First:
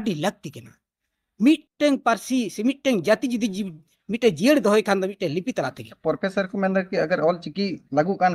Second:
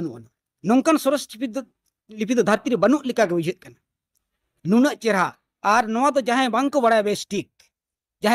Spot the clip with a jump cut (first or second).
first